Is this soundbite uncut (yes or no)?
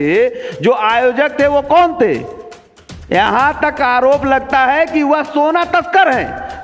yes